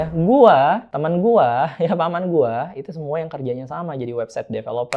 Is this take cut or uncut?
cut